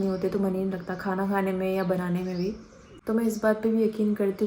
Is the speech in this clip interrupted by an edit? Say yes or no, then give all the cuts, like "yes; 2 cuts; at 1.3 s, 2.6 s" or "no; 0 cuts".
yes; 1 cut; at 2.8 s